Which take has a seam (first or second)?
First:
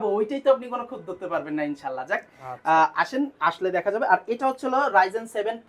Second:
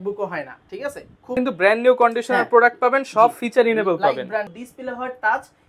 second